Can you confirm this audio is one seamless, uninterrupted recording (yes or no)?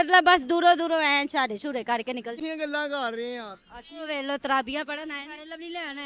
no